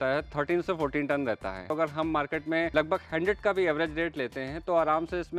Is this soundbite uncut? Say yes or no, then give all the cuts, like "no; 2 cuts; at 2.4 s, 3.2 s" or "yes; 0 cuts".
no; 2 cuts; at 1.7 s, 2.7 s